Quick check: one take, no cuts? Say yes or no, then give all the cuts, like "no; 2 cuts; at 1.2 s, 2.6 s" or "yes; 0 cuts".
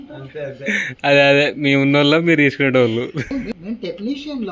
no; 1 cut; at 3.3 s